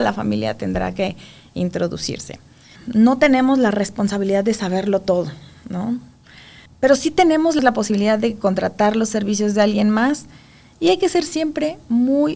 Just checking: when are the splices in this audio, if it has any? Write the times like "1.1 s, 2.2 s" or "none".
2.7 s